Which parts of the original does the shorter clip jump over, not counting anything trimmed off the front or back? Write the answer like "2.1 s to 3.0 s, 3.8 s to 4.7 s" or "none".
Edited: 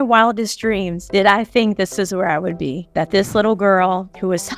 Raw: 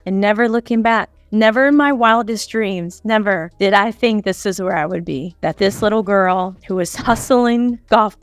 2.9 s to 3.5 s